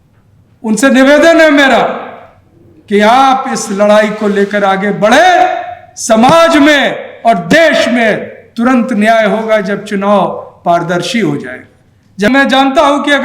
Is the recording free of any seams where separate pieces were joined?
no; 1 cut; at 12.3 s

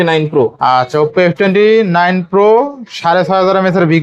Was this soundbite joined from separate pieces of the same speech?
no; 0 cuts

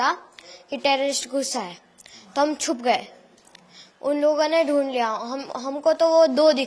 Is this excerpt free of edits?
yes; 0 cuts

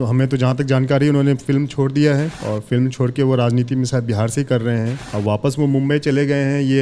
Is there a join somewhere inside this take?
yes; 2 cuts; at 2.4 s, 5.0 s

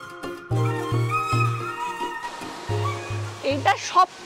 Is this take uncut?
no; 1 cut; at 3.2 s

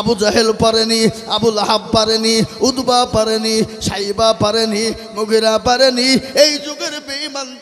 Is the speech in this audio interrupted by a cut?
no; 0 cuts

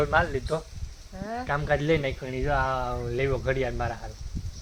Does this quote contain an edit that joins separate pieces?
no; 0 cuts

